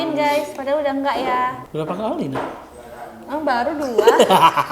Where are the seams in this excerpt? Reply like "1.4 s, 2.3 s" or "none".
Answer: 1.6 s